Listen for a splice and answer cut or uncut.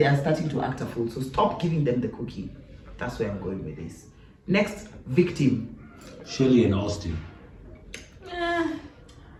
uncut